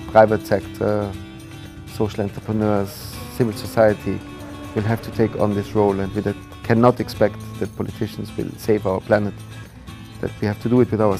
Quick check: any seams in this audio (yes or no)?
no